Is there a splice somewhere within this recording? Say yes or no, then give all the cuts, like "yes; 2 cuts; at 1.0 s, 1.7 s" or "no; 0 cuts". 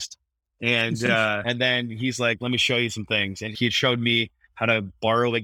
yes; 1 cut; at 3.5 s